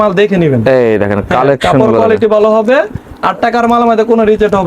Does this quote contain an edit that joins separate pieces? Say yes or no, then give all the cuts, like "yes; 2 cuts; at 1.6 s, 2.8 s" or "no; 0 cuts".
no; 0 cuts